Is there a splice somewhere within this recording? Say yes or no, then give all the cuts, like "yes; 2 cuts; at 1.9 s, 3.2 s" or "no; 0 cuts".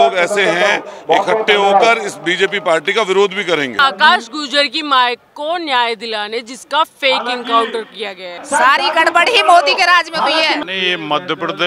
yes; 3 cuts; at 3.8 s, 8.4 s, 10.6 s